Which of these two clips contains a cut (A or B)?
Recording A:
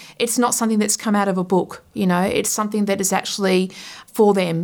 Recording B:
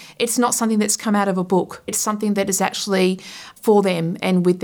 B